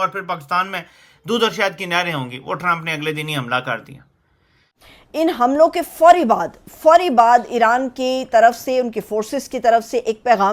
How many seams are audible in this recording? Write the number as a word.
one